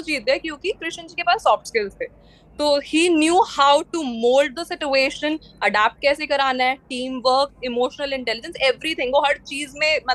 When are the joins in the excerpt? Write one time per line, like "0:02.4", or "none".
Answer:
none